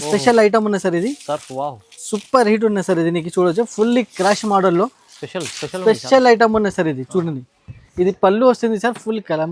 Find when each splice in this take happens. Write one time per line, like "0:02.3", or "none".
none

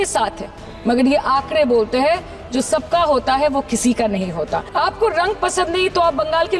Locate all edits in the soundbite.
0:04.7

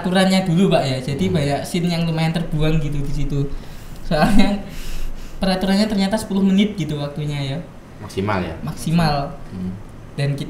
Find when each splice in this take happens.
none

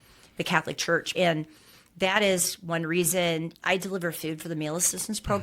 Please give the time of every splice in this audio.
0:01.1
0:03.5

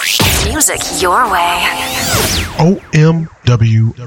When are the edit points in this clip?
none

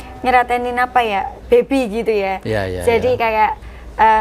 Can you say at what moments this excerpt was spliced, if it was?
none

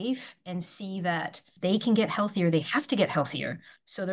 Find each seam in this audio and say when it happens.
0:01.5

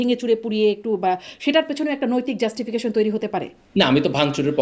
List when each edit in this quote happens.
0:03.6

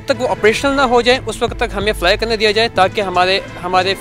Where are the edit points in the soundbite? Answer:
none

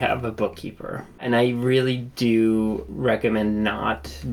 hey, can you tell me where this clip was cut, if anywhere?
0:01.2
0:02.9

